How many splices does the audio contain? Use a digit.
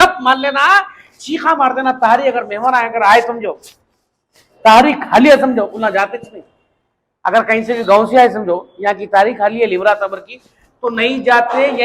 0